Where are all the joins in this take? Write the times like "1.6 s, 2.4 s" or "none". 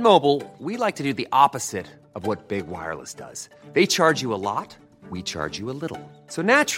none